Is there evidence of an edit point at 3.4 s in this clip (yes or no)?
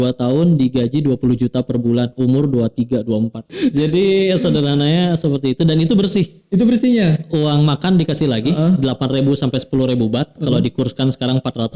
yes